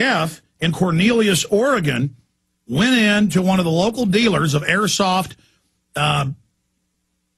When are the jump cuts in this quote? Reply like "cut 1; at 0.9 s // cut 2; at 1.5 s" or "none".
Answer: cut 1; at 1.2 s